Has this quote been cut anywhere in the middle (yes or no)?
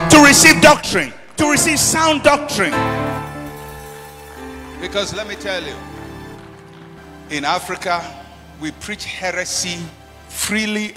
yes